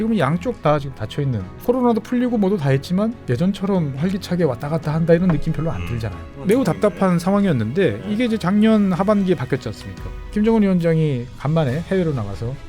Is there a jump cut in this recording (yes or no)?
yes